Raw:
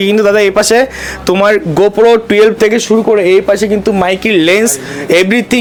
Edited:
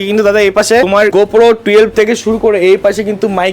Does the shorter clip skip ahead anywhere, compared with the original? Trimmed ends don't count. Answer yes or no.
yes